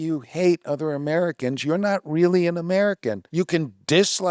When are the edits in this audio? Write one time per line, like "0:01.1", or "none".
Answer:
0:03.2